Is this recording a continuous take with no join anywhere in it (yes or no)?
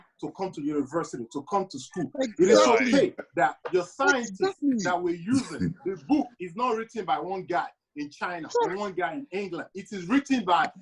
yes